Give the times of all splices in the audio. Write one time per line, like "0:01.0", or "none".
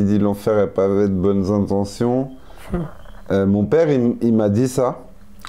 none